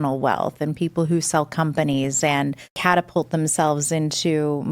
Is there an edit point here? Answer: yes; 1 cut; at 2.7 s

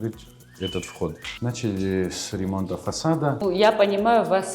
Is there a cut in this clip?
yes; 2 cuts; at 1.3 s, 3.4 s

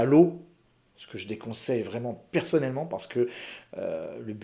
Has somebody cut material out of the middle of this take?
no; 0 cuts

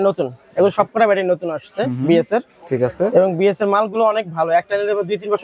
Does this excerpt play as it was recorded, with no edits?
yes; 0 cuts

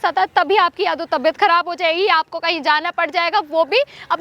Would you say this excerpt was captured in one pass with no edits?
yes; 0 cuts

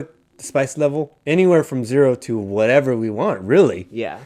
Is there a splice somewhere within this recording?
yes; 1 cut; at 1.1 s

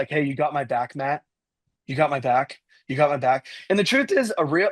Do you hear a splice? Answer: no; 0 cuts

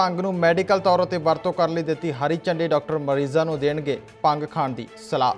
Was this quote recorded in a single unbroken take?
yes; 0 cuts

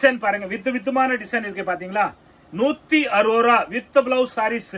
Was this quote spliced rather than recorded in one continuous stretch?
no; 0 cuts

